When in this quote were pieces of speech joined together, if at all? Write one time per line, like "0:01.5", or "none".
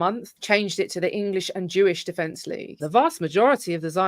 0:02.7